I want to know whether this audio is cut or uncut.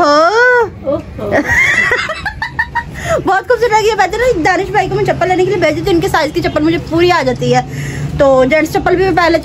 uncut